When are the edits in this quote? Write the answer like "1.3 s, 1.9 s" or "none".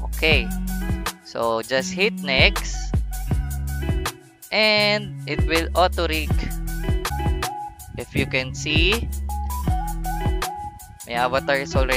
7.1 s